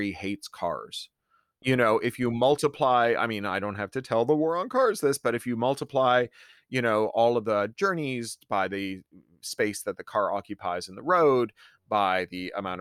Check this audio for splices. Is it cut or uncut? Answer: cut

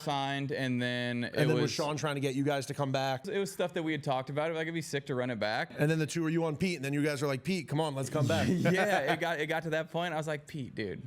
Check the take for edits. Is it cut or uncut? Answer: cut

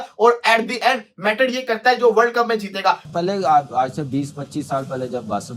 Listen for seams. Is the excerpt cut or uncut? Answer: cut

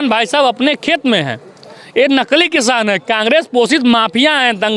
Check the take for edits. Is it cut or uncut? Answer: uncut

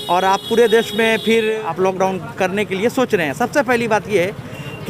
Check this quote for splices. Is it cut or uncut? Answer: cut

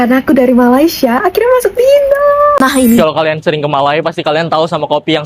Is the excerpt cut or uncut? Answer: cut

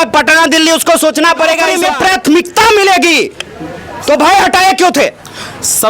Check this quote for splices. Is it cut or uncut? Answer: cut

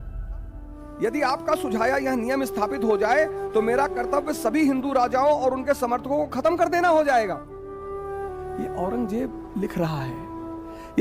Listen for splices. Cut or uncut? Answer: cut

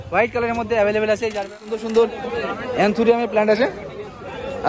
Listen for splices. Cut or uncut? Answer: cut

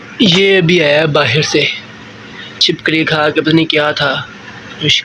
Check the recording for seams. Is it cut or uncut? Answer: uncut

